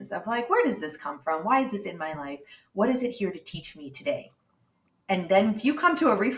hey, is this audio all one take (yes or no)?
yes